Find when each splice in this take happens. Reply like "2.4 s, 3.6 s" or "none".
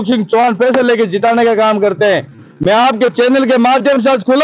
none

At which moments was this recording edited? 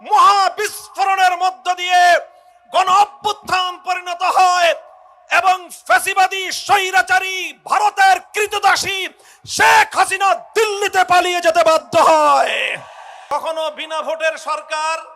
13.3 s

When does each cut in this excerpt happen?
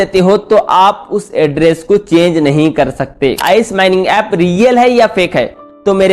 3.4 s

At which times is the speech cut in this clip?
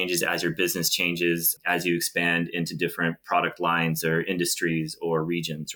none

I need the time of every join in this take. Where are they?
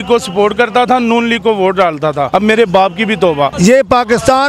2.3 s, 3.5 s

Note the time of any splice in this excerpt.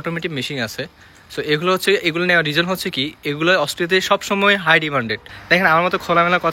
5.2 s

